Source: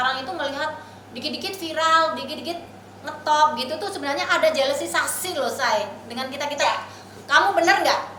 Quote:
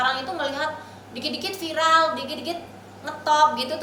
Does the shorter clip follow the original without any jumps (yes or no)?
yes